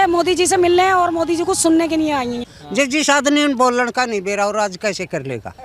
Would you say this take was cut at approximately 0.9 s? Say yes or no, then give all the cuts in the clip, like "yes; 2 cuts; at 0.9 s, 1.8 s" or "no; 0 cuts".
no; 1 cut; at 2.5 s